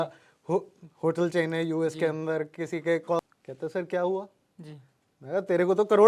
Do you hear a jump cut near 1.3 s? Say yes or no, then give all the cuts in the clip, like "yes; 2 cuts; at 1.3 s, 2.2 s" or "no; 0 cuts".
no; 1 cut; at 3.2 s